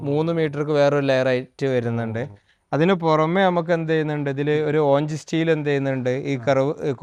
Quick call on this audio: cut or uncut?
uncut